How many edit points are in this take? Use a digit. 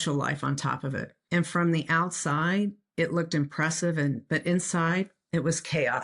2